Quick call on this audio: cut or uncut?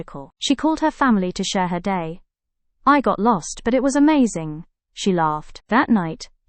uncut